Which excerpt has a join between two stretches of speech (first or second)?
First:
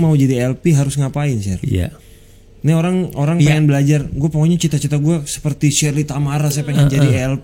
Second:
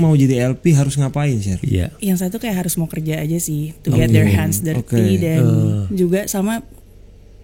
second